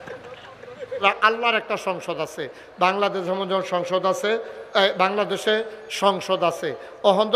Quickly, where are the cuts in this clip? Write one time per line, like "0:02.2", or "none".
0:01.0

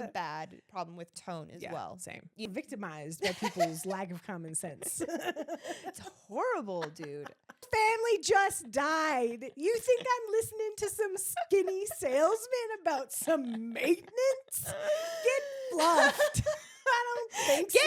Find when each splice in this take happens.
0:02.5
0:07.7

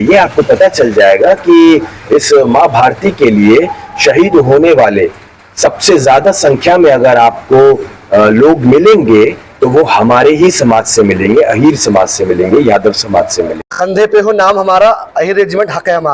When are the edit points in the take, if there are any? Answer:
0:13.9

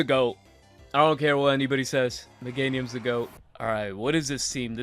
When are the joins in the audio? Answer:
0:03.4

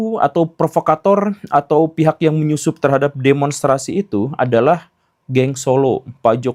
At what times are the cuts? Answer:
none

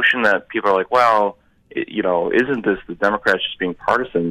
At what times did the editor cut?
none

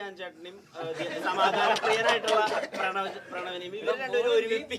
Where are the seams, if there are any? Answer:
none

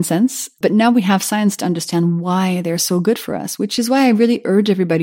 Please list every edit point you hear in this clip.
none

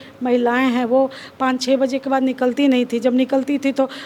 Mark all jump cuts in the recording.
none

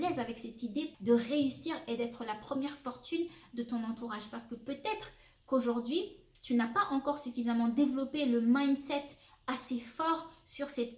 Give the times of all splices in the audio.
0:00.9

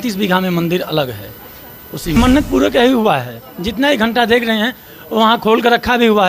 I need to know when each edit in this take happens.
0:02.2

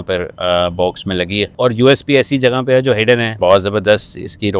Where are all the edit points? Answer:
0:01.5
0:03.4

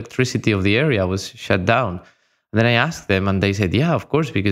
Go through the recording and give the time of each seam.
none

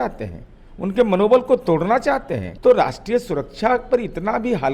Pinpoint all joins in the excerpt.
0:02.4

